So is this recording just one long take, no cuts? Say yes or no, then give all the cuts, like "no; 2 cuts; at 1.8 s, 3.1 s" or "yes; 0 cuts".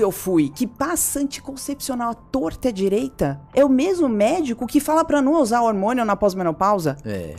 yes; 0 cuts